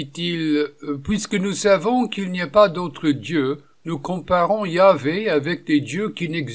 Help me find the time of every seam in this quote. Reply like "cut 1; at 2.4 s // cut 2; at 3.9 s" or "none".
none